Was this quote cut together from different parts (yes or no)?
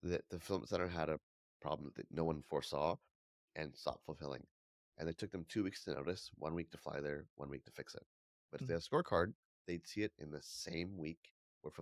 no